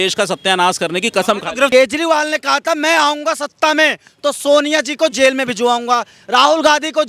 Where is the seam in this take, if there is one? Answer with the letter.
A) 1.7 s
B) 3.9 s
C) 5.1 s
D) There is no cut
A